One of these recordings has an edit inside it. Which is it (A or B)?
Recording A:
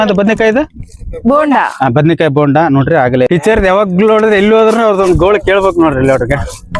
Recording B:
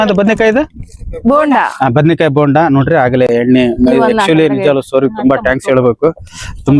A